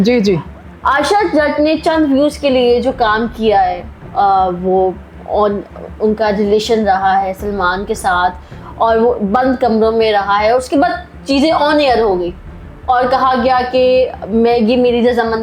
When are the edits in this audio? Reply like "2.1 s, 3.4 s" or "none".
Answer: none